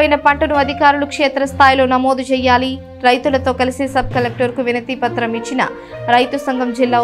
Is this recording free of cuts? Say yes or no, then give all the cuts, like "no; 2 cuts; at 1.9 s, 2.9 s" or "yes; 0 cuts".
yes; 0 cuts